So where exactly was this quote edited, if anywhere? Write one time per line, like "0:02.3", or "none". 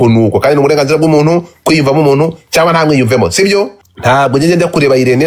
0:03.8